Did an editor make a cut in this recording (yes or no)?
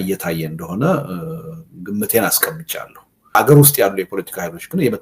yes